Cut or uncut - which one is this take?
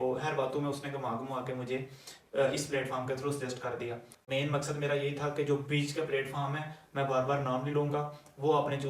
cut